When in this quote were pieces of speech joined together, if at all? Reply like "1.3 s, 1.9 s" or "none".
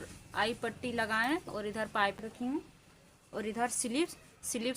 2.2 s